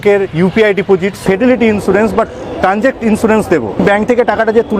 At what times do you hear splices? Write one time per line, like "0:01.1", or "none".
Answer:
0:01.2
0:03.8